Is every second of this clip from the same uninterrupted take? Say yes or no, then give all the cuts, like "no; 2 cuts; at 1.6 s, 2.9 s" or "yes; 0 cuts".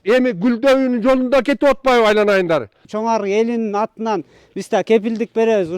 no; 1 cut; at 2.8 s